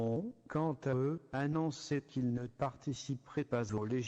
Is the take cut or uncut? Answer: uncut